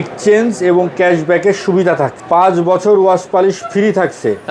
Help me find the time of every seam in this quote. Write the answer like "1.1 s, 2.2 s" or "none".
2.2 s